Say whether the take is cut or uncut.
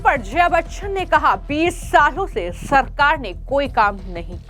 uncut